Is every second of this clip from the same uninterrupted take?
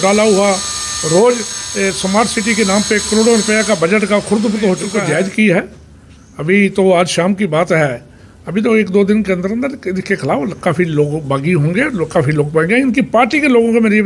no; 1 cut; at 4.9 s

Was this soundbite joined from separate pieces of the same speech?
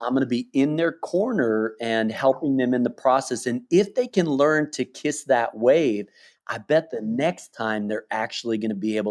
no; 0 cuts

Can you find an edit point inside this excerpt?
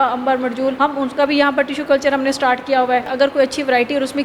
yes; 2 cuts; at 0.8 s, 3.1 s

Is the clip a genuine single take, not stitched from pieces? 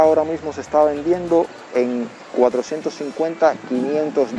yes; 0 cuts

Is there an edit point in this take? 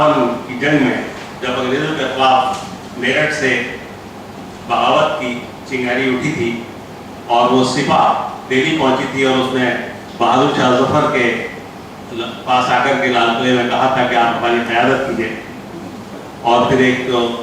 yes; 2 cuts; at 1.3 s, 2.8 s

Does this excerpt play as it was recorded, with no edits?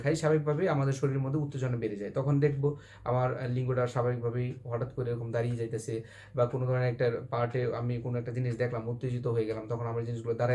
yes; 0 cuts

